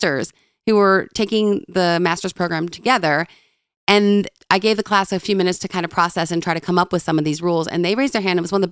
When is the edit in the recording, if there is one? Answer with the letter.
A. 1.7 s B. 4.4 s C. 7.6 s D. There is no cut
B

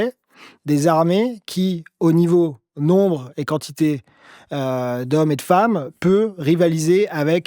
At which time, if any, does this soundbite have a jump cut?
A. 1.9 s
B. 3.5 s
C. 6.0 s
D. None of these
D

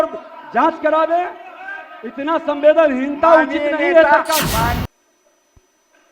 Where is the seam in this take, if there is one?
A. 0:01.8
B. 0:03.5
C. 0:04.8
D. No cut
C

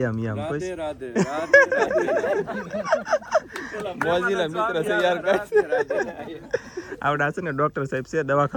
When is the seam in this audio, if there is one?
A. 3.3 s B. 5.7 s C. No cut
C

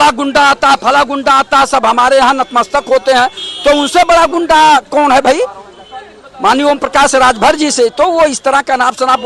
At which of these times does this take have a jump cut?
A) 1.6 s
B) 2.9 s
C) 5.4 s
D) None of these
D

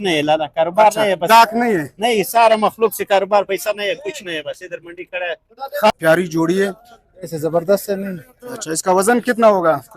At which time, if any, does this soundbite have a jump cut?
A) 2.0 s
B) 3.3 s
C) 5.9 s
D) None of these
C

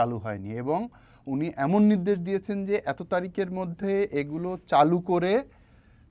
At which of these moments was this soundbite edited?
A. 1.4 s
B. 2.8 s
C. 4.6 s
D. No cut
D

